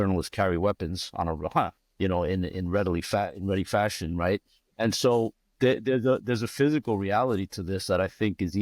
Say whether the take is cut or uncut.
uncut